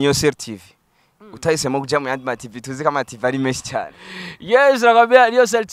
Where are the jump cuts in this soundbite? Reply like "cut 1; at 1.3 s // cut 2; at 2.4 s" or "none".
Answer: none

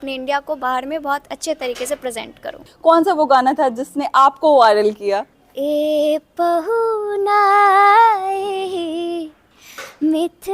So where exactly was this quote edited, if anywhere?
cut 1; at 2.7 s // cut 2; at 5.4 s

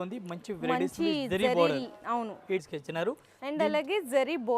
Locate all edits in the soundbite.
cut 1; at 2.6 s

